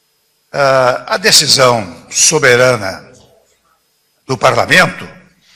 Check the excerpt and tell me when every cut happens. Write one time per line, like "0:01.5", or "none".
none